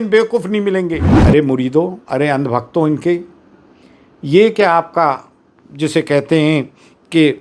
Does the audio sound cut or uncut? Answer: cut